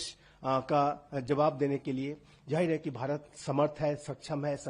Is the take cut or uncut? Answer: uncut